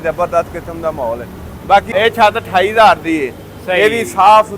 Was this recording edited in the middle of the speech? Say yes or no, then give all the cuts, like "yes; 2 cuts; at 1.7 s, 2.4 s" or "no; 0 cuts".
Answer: yes; 1 cut; at 1.9 s